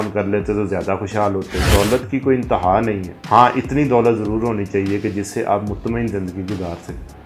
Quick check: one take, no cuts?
no; 1 cut; at 1.6 s

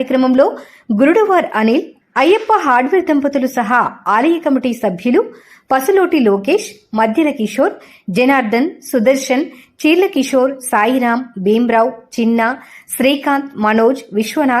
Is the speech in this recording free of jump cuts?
no; 1 cut; at 2.0 s

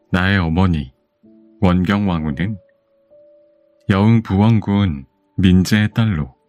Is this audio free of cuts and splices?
yes; 0 cuts

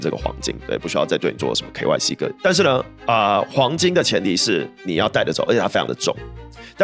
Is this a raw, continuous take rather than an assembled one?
no; 1 cut; at 2.3 s

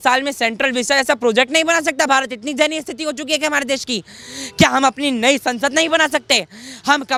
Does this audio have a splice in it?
no; 0 cuts

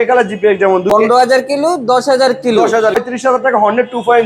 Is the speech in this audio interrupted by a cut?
yes; 2 cuts; at 1.1 s, 3.0 s

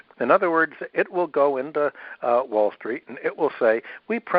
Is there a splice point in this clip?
no; 0 cuts

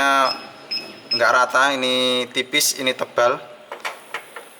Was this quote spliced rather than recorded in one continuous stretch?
no; 0 cuts

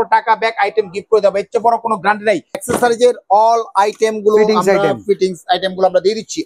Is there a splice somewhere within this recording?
yes; 1 cut; at 2.6 s

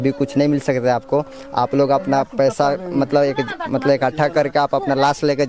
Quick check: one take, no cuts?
yes; 0 cuts

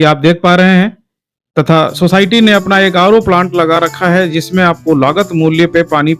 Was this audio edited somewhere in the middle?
no; 0 cuts

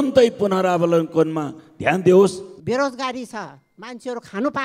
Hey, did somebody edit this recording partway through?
yes; 1 cut; at 2.5 s

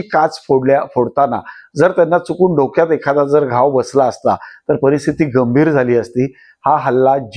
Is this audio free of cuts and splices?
yes; 0 cuts

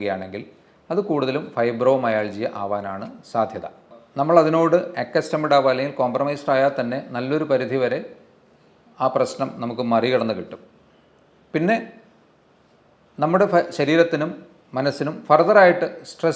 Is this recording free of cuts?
no; 1 cut; at 4.0 s

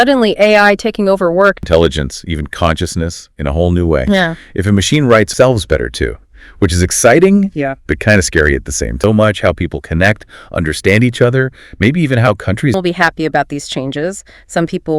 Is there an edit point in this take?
yes; 4 cuts; at 1.6 s, 5.3 s, 9.0 s, 12.7 s

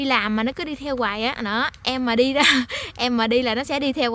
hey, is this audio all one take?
yes; 0 cuts

